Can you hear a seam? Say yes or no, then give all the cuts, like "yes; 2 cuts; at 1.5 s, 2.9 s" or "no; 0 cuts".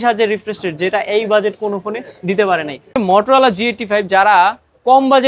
yes; 1 cut; at 3.0 s